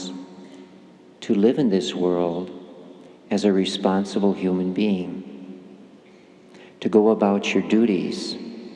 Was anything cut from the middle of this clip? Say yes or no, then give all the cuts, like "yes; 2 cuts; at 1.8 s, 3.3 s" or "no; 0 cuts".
no; 0 cuts